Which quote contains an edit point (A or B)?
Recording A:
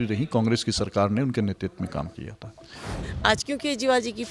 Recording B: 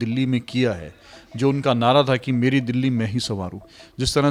A